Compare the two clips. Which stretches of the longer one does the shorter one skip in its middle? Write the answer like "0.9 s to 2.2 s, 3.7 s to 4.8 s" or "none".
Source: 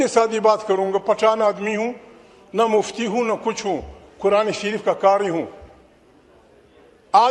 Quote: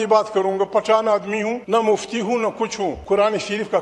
1.9 s to 2.5 s, 3.8 s to 4.1 s